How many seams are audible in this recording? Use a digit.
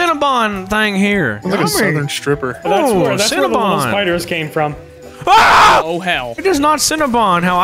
1